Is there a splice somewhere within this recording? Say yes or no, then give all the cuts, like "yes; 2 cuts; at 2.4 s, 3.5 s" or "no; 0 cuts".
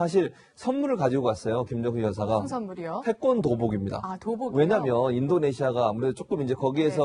no; 0 cuts